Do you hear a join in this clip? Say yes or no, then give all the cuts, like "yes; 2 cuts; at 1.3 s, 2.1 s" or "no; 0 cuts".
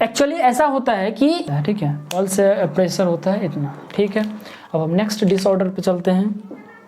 yes; 1 cut; at 1.4 s